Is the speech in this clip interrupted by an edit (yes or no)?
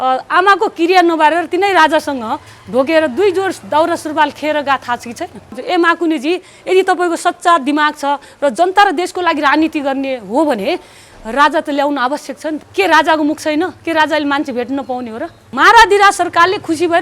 yes